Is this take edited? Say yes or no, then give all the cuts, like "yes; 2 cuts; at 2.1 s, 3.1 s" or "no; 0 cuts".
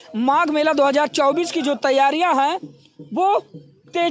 no; 0 cuts